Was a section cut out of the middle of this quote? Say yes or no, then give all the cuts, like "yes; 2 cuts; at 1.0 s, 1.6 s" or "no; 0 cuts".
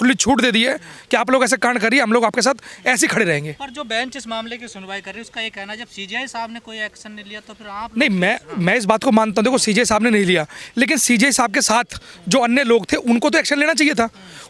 no; 0 cuts